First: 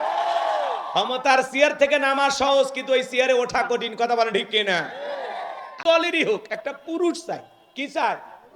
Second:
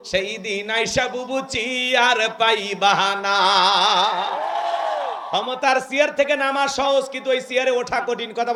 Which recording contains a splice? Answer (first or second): first